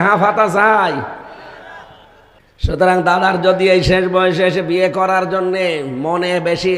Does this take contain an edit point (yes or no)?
yes